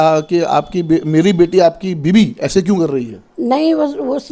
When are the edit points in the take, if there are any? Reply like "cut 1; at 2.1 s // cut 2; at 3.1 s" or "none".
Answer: none